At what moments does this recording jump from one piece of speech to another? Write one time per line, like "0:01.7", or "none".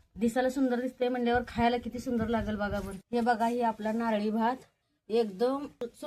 0:02.9

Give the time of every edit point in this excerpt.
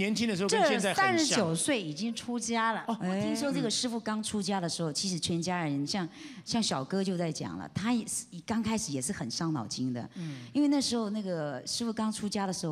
0:03.3

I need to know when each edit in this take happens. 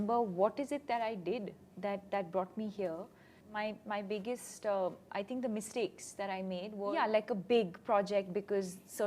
0:03.4
0:06.9

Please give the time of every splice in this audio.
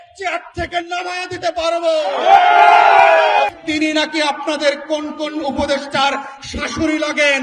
0:03.6

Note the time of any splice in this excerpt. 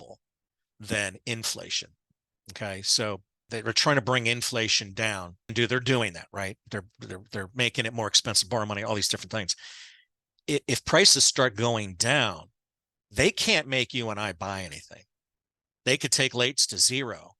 0:03.4
0:05.5

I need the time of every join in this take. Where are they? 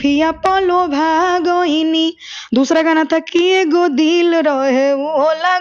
none

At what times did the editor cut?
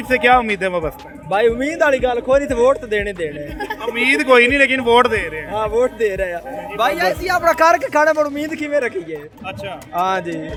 none

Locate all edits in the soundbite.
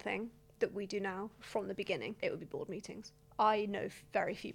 0:02.1
0:03.1

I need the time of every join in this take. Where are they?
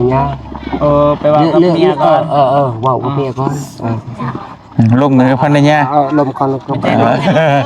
none

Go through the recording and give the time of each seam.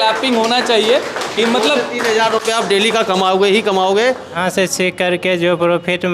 0:04.4

